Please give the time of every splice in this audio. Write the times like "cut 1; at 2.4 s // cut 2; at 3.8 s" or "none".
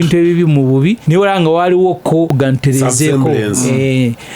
cut 1; at 1.0 s // cut 2; at 2.3 s